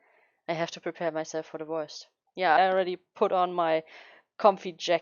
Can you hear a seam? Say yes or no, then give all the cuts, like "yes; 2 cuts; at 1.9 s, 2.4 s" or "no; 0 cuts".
yes; 1 cut; at 2.6 s